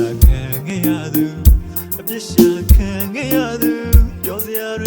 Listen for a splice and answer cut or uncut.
cut